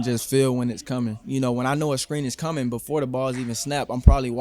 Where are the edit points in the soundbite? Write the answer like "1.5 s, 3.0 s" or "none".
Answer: 1.2 s